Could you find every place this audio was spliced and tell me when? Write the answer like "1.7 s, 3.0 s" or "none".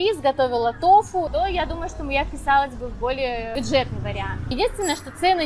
1.3 s, 3.5 s, 4.5 s